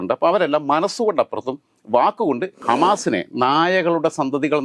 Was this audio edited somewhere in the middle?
yes; 1 cut; at 2.6 s

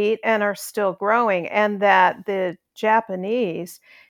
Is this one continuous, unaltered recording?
yes; 0 cuts

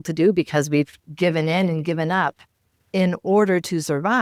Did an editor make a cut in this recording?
yes; 1 cut; at 1.0 s

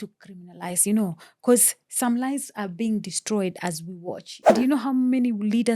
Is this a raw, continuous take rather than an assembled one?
no; 1 cut; at 4.5 s

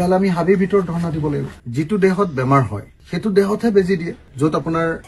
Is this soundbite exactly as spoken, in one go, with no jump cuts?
no; 2 cuts; at 1.6 s, 4.2 s

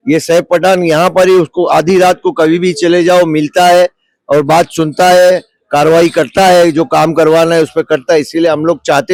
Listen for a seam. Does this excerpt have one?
no; 0 cuts

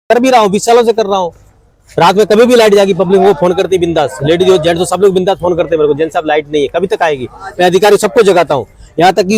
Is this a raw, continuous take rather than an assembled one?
yes; 0 cuts

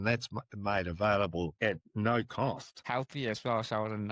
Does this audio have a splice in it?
yes; 2 cuts; at 1.5 s, 2.7 s

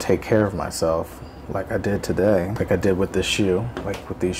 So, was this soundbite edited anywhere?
yes; 1 cut; at 2.5 s

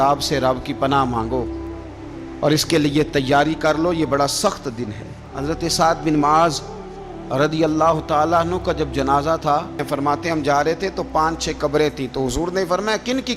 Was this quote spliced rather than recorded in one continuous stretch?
yes; 2 cuts; at 5.3 s, 9.8 s

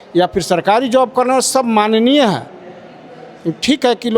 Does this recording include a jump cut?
no; 0 cuts

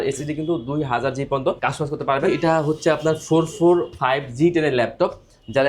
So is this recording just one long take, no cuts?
no; 1 cut; at 2.2 s

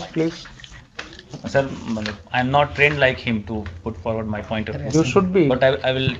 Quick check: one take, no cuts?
yes; 0 cuts

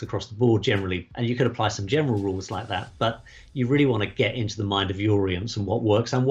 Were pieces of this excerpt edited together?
yes; 1 cut; at 1.0 s

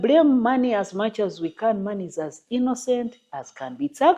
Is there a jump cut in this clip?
no; 0 cuts

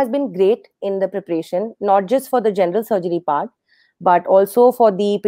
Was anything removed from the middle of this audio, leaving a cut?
no; 0 cuts

